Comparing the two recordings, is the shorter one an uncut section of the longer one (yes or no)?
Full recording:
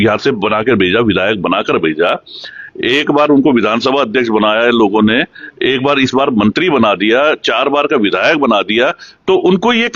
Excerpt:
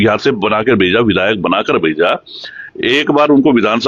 yes